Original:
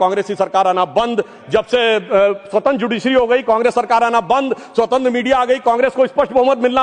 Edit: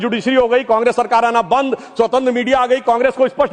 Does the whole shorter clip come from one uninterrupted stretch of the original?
yes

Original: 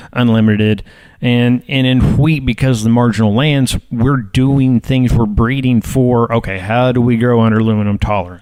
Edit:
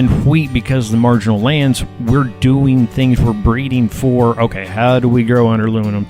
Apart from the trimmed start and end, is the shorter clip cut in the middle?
no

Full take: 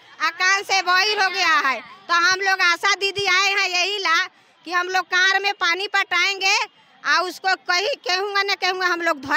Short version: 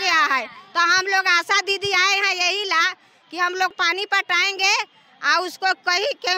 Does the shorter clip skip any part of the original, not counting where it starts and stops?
yes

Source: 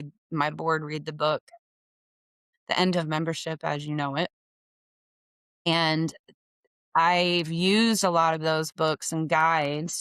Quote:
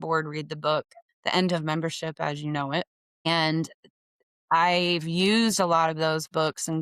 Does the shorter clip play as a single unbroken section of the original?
no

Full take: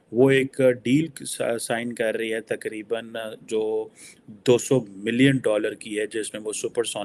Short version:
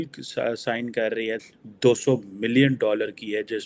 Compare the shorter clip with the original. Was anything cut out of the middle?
yes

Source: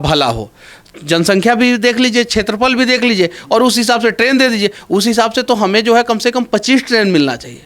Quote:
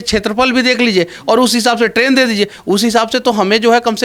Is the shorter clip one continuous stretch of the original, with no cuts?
yes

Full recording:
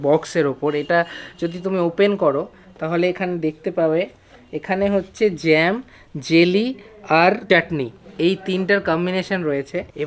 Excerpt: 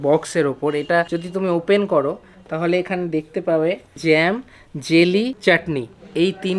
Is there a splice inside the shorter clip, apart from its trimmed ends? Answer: yes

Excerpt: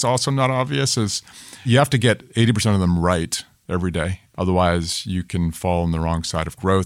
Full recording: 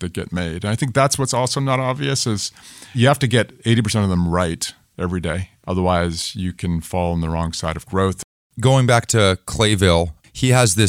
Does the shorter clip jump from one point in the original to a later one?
no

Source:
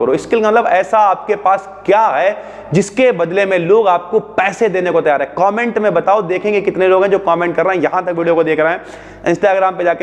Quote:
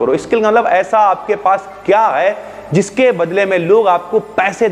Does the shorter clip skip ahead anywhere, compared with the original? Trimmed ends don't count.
no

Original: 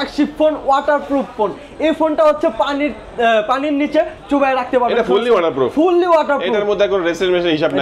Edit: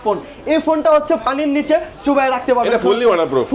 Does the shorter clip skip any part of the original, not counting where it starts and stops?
yes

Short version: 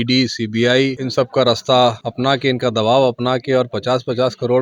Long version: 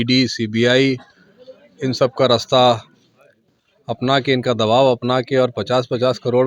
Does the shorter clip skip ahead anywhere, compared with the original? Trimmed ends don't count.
yes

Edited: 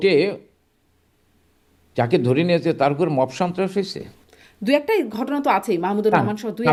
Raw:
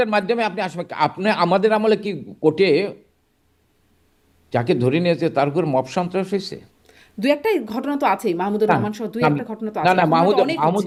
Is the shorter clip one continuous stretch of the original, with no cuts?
yes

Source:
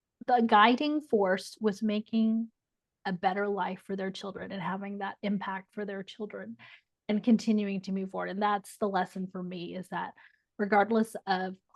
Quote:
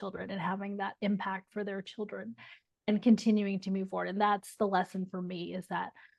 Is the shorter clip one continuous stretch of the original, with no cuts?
yes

